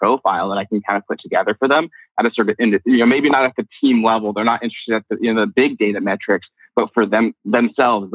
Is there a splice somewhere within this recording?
no; 0 cuts

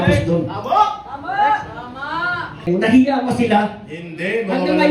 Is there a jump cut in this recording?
yes; 1 cut; at 2.7 s

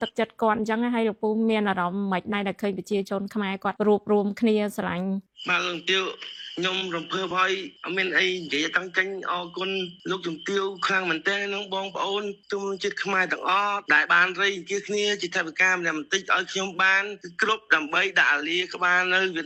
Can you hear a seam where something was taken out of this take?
no; 0 cuts

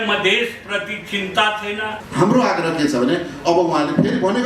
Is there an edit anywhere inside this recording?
yes; 1 cut; at 2.0 s

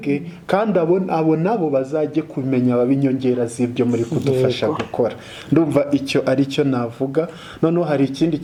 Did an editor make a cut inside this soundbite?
no; 0 cuts

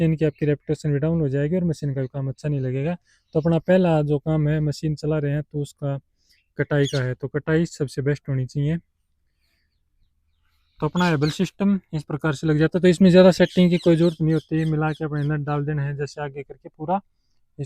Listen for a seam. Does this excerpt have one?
no; 0 cuts

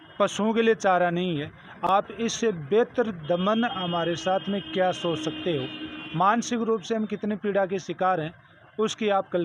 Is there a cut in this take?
no; 0 cuts

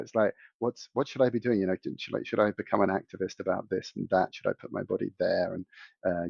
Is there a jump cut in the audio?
no; 0 cuts

